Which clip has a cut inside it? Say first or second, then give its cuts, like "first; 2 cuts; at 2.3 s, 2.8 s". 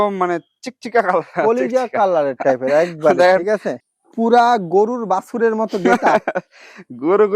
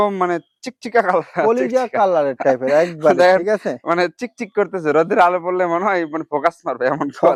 first; 1 cut; at 3.8 s